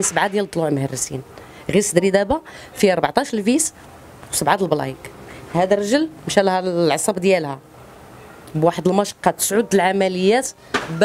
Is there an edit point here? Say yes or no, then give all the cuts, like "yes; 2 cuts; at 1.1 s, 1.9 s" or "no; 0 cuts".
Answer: no; 0 cuts